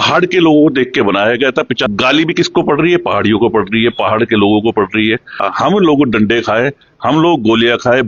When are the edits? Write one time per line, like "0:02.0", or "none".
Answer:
0:01.9
0:05.4

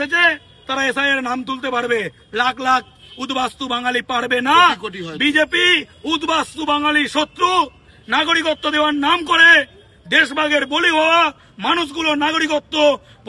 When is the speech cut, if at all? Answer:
none

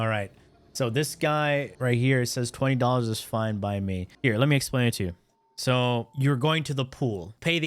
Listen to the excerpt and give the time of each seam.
0:01.7
0:04.1

